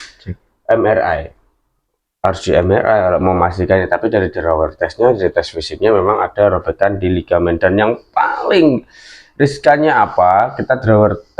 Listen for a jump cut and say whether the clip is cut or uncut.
uncut